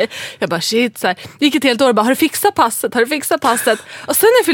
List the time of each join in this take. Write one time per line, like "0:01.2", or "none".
none